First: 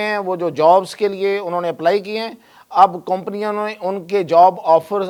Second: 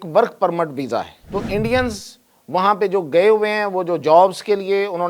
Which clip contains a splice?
second; 1 cut; at 1.2 s

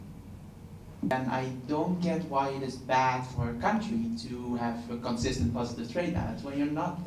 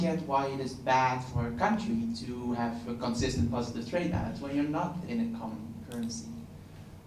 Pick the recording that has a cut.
first; 1 cut; at 1.1 s

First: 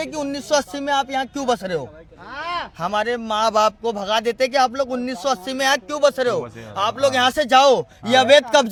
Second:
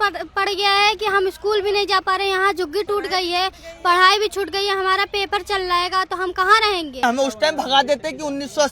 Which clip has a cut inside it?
second; 1 cut; at 7.0 s

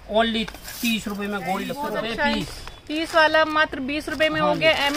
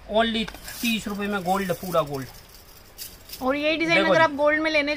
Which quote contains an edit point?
first; 1 cut; at 1.7 s

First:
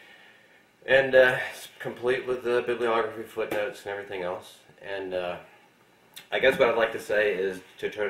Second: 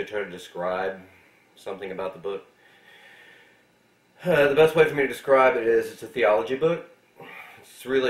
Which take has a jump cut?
first; 1 cut; at 5.2 s

